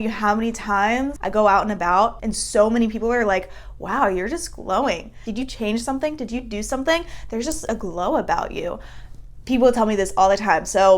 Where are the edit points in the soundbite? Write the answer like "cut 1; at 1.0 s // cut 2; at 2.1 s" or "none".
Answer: cut 1; at 1.1 s